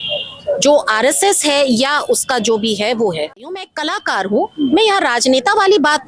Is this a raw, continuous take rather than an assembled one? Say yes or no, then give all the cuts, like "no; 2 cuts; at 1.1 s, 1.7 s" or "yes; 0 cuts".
no; 1 cut; at 3.6 s